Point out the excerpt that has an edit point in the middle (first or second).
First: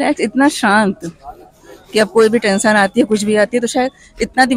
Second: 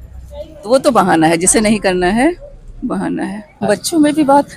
second